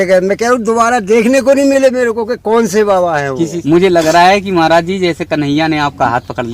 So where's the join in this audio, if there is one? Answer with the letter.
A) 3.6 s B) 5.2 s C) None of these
A